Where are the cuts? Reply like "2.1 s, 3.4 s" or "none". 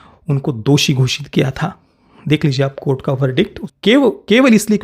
3.6 s